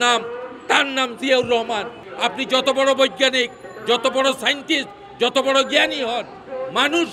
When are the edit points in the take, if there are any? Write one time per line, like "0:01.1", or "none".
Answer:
0:02.0